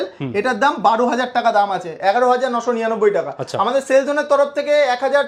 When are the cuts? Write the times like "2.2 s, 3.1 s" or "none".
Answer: none